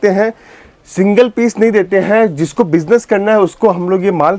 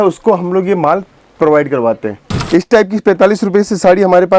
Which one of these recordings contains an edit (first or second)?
second